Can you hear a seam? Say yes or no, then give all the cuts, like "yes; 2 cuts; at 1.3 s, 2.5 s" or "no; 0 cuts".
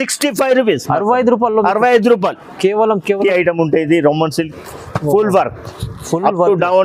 yes; 1 cut; at 3.2 s